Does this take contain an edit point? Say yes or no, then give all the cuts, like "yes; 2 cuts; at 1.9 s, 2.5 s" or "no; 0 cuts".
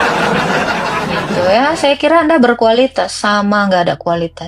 yes; 1 cut; at 1.0 s